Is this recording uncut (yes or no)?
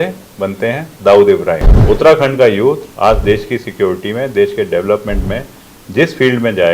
no